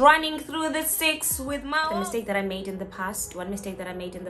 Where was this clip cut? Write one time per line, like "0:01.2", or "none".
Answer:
0:01.8